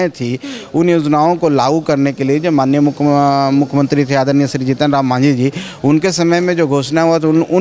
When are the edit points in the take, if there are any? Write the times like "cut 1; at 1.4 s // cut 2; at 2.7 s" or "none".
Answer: none